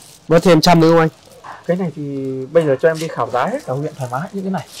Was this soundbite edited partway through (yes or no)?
no